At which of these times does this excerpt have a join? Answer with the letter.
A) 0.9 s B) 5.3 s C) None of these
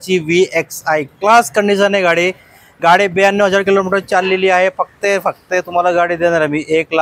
C